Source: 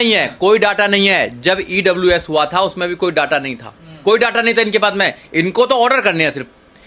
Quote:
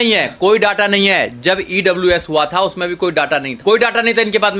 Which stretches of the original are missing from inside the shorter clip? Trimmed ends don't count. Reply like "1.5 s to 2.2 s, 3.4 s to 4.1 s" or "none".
3.5 s to 3.9 s